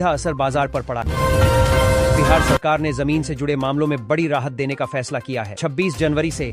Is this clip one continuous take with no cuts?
no; 2 cuts; at 1.0 s, 2.4 s

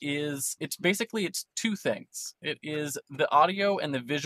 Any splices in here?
no; 0 cuts

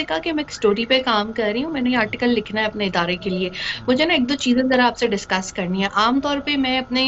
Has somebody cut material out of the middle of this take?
no; 0 cuts

